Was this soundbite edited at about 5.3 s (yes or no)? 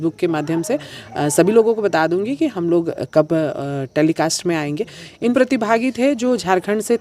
yes